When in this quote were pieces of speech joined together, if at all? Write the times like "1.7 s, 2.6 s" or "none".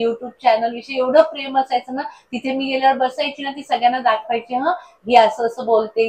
none